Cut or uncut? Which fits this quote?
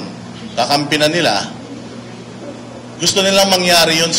uncut